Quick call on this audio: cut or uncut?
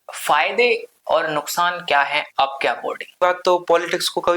cut